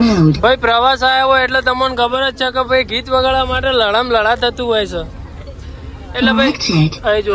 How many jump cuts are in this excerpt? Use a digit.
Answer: 0